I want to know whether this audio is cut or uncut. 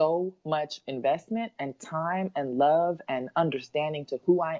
uncut